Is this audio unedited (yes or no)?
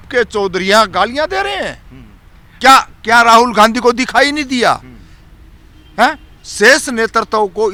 yes